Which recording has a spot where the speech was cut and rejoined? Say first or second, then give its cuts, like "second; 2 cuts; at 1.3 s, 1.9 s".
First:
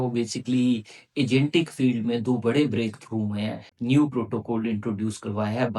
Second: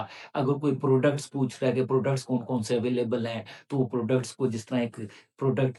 first; 1 cut; at 3.7 s